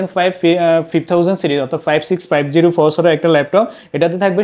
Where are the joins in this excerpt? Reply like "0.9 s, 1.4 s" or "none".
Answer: none